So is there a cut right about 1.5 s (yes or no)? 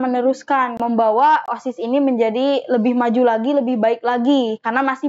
yes